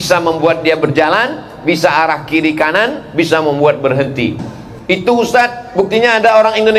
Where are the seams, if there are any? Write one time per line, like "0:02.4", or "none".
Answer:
0:04.5